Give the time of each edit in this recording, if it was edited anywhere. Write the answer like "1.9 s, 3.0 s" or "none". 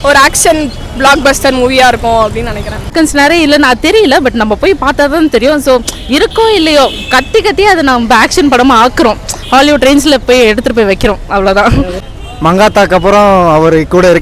2.9 s, 12.0 s